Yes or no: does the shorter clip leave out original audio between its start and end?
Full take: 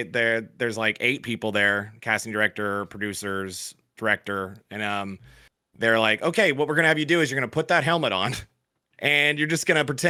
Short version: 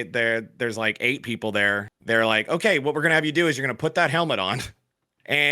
yes